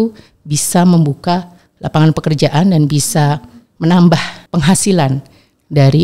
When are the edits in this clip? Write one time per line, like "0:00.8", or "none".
0:04.4